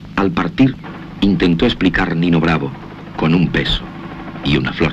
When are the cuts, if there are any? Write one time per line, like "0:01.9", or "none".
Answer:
none